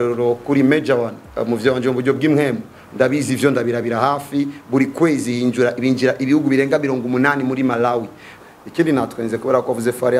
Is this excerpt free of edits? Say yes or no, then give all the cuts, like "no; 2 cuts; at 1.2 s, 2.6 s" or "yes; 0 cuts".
no; 1 cut; at 8.3 s